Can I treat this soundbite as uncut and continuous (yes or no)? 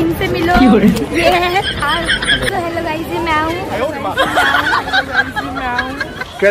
no